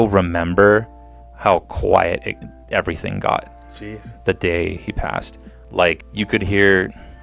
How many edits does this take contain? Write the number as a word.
one